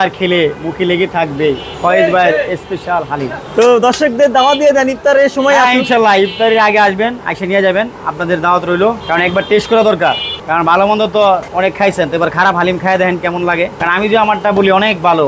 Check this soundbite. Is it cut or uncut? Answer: uncut